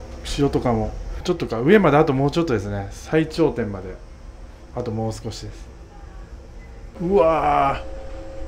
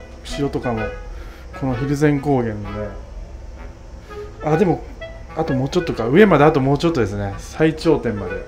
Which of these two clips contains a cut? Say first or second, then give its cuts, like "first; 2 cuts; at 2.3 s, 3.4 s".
first; 2 cuts; at 1.2 s, 6.9 s